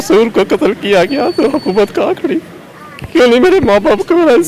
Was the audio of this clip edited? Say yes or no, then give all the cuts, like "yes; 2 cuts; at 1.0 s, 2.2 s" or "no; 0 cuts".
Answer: no; 0 cuts